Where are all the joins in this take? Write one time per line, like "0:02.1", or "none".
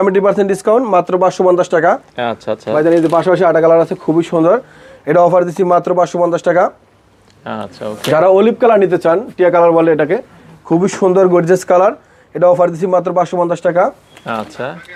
none

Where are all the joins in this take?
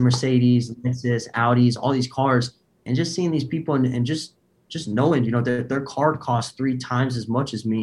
none

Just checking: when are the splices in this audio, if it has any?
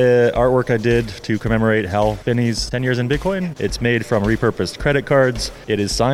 0:02.4
0:03.5

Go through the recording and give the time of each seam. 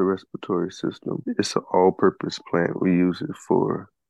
0:01.2

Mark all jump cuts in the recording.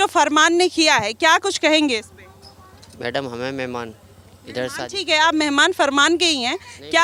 none

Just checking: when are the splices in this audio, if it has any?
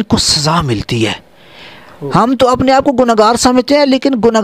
none

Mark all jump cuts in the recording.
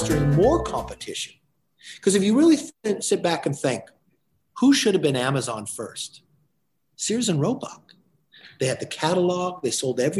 0:02.7

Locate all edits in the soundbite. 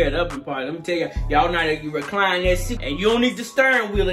0:02.7

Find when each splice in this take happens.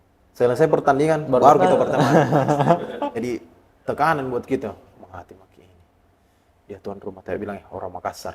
0:03.1

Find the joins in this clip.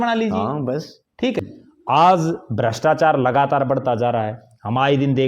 0:01.4

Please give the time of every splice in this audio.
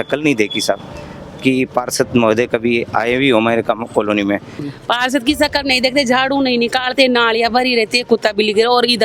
0:04.6

